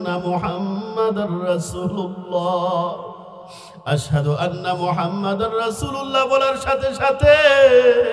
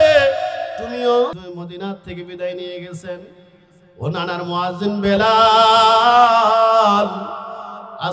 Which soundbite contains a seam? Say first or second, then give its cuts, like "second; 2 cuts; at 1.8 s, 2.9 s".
second; 1 cut; at 1.3 s